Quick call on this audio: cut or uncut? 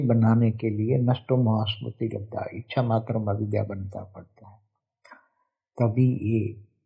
uncut